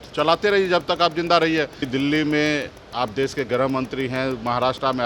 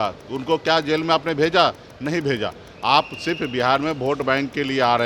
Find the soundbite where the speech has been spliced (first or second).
first